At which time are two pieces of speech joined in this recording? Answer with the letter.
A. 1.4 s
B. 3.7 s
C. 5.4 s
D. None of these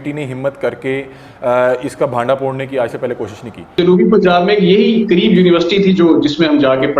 B